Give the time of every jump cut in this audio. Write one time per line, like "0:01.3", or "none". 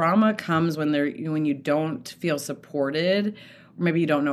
none